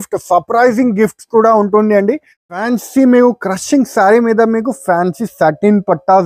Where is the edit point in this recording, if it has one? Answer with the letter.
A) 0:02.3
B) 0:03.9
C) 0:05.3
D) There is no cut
A